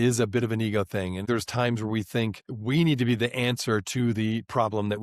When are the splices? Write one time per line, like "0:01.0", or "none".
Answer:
0:01.2